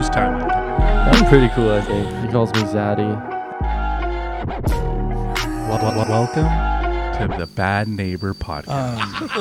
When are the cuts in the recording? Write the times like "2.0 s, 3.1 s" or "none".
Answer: none